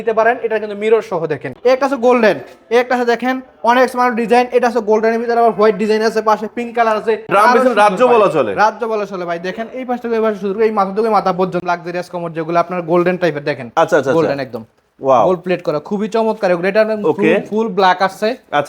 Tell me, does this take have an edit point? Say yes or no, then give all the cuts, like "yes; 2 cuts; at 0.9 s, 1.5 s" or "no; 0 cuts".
yes; 3 cuts; at 1.5 s, 7.3 s, 11.6 s